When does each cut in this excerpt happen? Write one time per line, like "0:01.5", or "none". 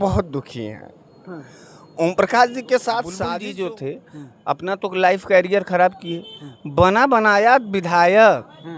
0:03.2